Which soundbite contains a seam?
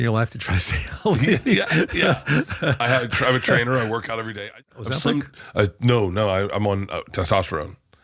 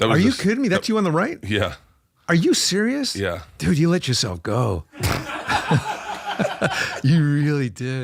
first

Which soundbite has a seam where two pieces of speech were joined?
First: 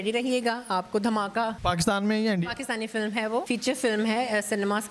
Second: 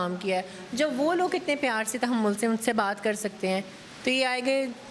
first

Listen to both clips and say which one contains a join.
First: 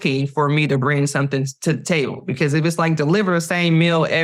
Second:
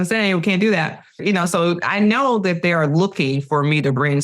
second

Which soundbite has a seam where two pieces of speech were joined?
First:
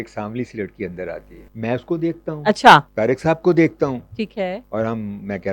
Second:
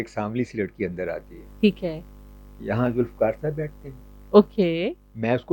first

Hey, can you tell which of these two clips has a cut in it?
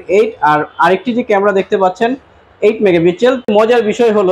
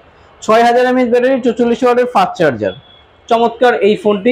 first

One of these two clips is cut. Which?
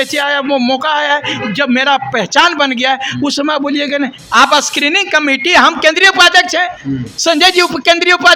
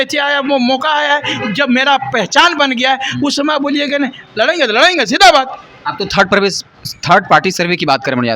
first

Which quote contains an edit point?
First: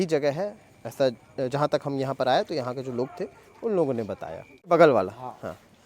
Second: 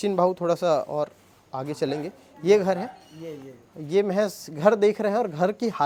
first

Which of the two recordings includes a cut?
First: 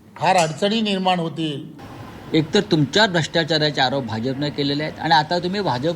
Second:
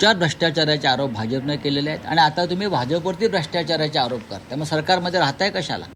first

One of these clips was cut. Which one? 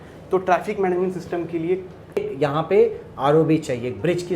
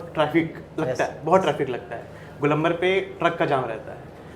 first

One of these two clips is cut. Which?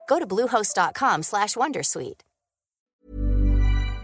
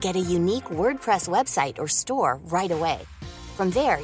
first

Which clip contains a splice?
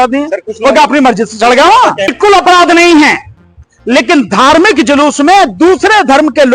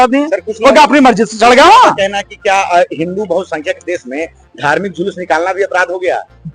first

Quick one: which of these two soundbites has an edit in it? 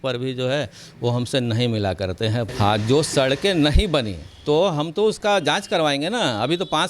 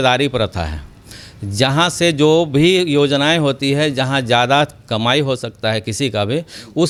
first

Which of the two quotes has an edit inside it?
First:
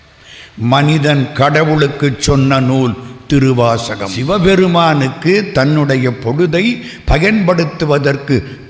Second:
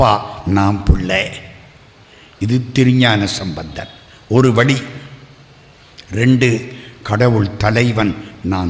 first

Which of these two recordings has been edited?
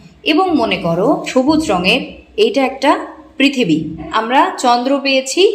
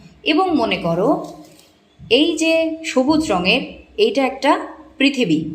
first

